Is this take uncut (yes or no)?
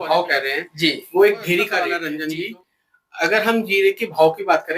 no